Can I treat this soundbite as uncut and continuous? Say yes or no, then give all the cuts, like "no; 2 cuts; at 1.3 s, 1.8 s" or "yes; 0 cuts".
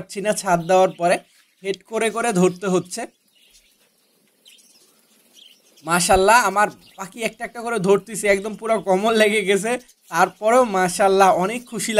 yes; 0 cuts